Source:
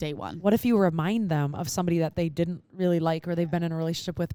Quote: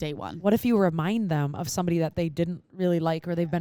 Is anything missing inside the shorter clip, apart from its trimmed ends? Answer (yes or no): no